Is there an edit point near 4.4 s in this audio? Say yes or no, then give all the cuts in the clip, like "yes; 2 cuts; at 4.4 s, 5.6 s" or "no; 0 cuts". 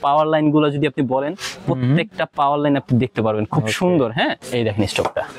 yes; 1 cut; at 4.4 s